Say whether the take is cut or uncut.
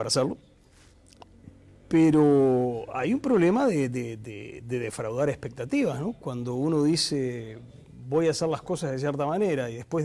uncut